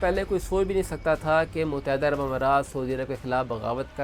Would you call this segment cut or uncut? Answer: uncut